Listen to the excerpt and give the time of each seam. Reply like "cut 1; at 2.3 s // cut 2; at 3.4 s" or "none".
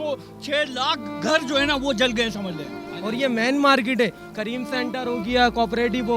cut 1; at 2.9 s